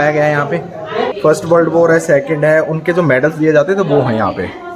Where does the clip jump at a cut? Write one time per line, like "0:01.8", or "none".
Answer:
0:01.1